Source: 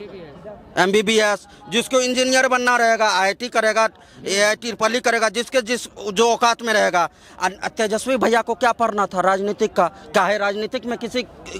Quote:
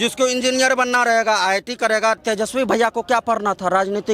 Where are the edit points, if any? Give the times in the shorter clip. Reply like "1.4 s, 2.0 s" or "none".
2.2 s